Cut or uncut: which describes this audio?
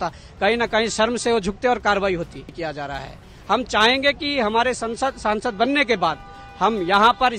cut